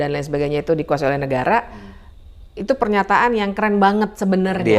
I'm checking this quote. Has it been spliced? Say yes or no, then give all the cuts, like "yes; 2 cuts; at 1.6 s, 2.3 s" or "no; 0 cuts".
no; 0 cuts